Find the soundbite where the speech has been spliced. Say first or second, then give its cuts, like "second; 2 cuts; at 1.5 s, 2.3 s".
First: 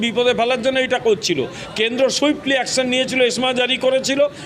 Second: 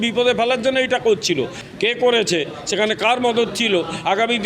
second; 1 cut; at 1.6 s